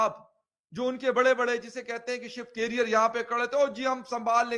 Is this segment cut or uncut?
uncut